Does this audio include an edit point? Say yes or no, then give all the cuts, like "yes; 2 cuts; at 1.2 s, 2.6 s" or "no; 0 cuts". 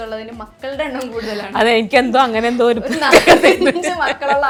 no; 0 cuts